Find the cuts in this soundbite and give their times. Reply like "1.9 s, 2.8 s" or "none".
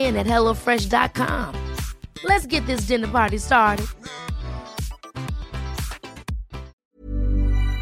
6.8 s